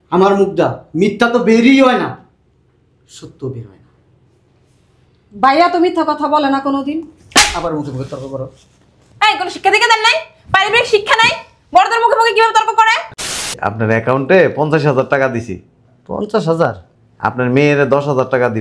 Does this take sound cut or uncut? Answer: cut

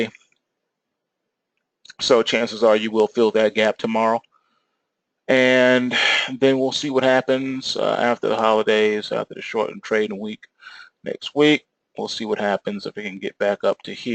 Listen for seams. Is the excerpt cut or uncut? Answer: cut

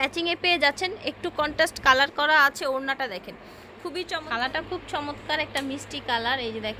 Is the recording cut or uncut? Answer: cut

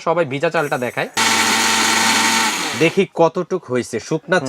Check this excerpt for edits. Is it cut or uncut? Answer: cut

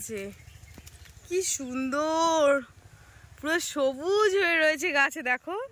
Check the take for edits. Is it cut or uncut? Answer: uncut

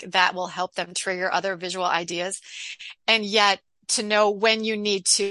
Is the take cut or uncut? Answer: uncut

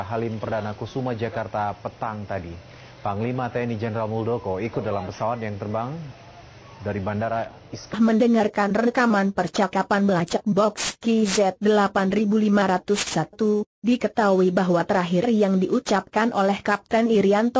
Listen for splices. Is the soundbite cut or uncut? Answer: uncut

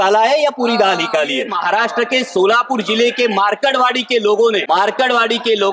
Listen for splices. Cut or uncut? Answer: cut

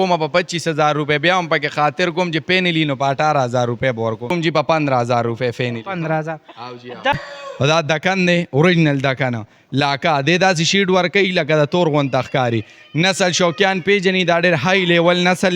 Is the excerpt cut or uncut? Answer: cut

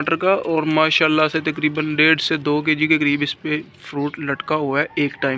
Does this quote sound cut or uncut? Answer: uncut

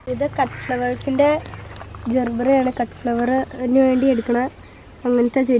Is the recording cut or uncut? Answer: uncut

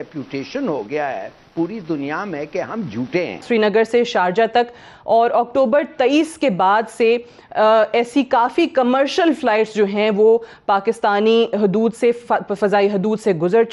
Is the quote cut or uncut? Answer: cut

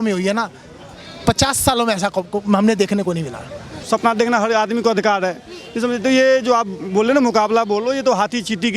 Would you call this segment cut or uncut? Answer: cut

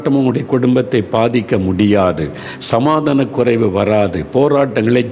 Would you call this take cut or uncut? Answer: uncut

